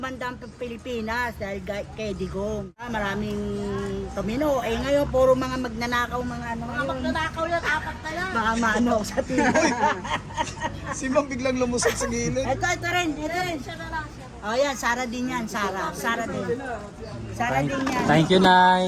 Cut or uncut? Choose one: cut